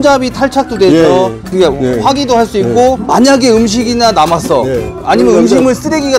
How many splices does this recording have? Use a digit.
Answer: 1